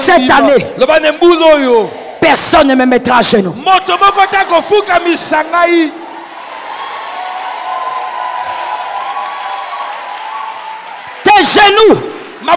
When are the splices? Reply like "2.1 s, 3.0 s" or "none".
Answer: 6.3 s